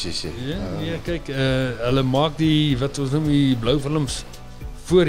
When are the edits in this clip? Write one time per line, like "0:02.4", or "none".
none